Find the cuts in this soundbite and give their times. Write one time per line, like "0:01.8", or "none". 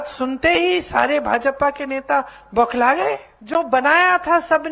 0:03.3